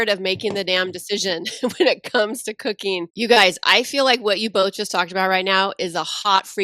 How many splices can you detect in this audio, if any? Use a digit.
1